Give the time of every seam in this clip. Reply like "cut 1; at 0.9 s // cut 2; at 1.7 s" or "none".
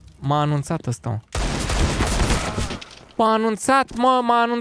none